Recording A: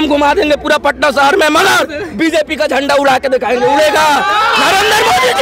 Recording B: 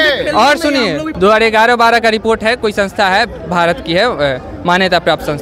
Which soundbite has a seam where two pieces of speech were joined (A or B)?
B